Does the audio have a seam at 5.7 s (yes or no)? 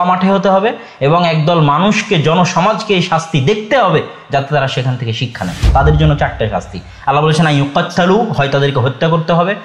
yes